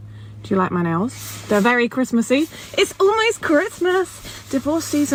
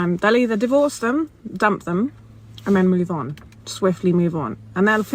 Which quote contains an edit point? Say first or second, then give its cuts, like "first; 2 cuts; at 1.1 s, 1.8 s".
second; 1 cut; at 1.0 s